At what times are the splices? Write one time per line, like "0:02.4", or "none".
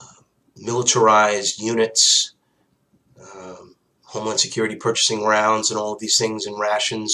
0:02.7

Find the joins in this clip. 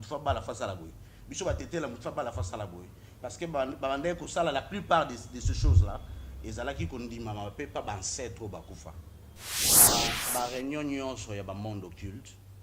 0:09.8

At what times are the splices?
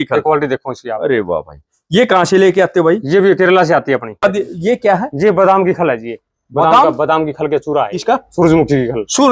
0:04.2
0:08.0

